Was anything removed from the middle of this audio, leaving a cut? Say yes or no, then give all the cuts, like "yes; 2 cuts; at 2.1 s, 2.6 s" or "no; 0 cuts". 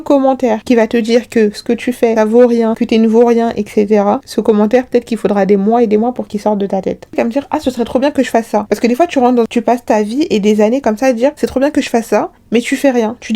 yes; 1 cut; at 7.1 s